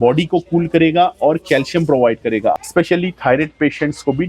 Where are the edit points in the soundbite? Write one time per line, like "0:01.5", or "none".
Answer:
0:02.6